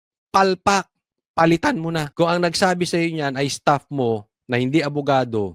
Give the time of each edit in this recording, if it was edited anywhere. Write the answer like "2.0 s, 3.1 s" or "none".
2.1 s